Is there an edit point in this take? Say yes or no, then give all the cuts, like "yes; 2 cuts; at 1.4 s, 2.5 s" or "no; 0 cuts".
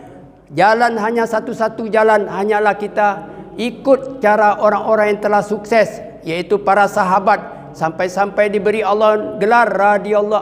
no; 0 cuts